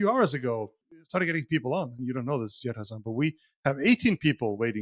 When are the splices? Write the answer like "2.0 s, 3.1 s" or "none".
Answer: 0.9 s